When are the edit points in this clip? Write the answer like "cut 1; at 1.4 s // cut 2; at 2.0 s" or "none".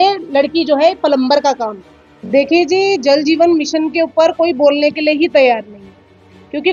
none